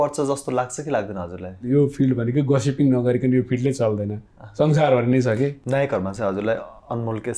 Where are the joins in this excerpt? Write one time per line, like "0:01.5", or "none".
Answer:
0:01.6
0:05.6